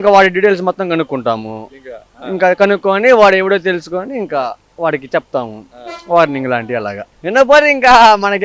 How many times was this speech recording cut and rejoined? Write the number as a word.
one